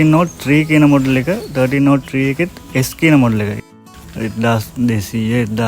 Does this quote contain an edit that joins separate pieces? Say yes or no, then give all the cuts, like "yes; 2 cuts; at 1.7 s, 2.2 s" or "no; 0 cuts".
yes; 1 cut; at 3.6 s